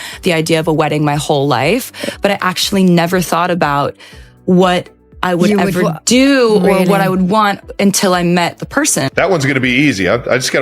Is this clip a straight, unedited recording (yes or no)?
no